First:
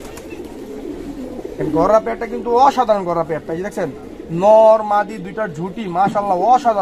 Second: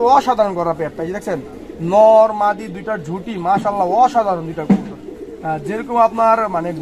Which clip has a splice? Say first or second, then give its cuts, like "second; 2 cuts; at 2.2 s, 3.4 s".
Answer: first; 1 cut; at 1.6 s